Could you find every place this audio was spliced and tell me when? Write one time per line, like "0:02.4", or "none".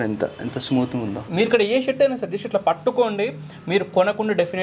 0:01.3